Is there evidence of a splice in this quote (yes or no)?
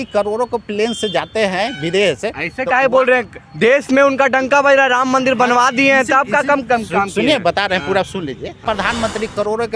yes